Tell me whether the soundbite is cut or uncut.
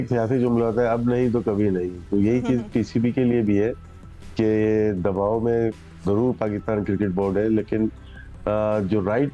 uncut